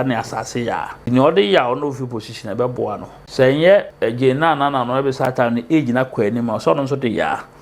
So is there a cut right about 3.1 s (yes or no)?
yes